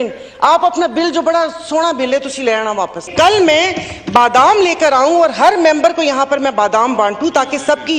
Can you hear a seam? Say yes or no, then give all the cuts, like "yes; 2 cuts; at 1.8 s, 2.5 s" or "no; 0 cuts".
yes; 1 cut; at 3.1 s